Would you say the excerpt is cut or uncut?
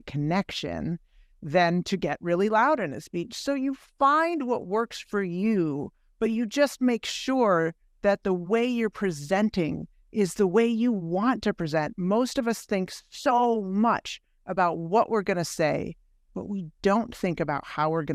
uncut